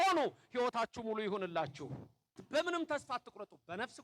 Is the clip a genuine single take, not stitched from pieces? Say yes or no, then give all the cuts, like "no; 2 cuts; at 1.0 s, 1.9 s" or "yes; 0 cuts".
no; 1 cut; at 2.4 s